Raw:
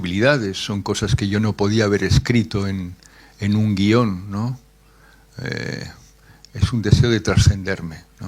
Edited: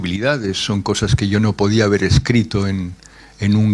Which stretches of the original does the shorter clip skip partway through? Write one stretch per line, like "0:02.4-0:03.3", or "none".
none